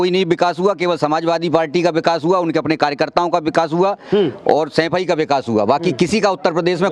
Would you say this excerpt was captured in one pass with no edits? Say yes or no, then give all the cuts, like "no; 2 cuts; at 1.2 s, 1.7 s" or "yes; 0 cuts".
yes; 0 cuts